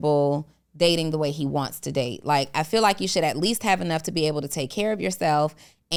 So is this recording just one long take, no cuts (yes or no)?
yes